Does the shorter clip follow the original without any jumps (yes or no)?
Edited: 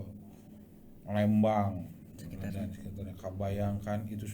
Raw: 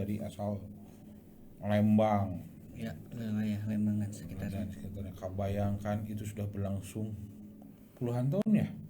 no